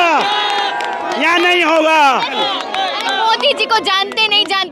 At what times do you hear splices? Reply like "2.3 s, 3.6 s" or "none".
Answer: 2.3 s